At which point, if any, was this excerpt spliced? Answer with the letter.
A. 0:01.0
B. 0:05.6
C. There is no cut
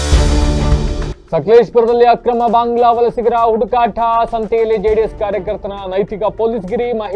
A